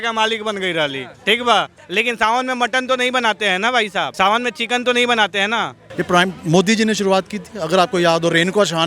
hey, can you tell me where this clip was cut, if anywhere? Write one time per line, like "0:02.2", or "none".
0:01.8
0:04.1
0:05.9